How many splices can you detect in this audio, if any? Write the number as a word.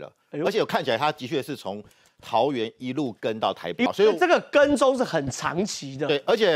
one